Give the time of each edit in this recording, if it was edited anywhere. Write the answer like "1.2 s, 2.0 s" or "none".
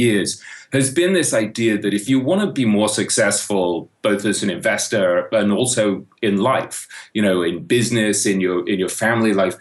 2.0 s